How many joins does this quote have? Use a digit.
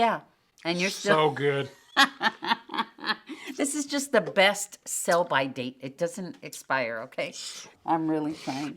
1